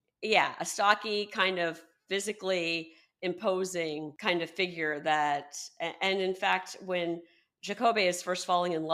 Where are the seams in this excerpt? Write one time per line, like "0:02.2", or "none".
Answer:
0:04.1